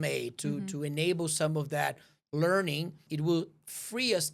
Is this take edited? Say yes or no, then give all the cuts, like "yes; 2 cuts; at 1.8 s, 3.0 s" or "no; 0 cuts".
yes; 1 cut; at 3.0 s